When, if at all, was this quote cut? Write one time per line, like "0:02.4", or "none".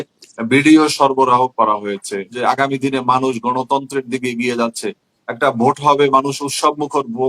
0:02.4